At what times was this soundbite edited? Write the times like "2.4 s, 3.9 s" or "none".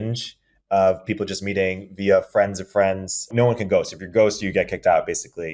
3.3 s